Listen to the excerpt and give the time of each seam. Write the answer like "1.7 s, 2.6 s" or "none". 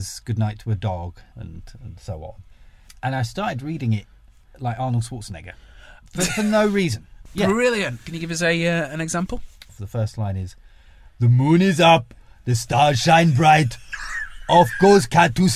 1.2 s, 6.0 s, 7.2 s, 9.8 s